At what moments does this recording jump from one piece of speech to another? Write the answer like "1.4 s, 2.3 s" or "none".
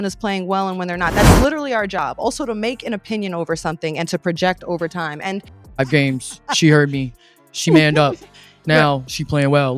5.6 s